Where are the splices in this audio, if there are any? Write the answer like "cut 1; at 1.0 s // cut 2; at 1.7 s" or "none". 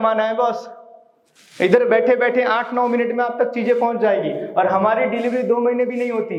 none